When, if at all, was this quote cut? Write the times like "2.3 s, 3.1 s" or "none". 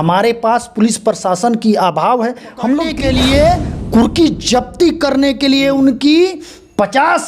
2.9 s